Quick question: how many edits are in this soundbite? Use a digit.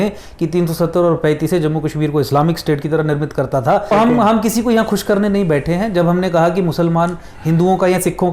1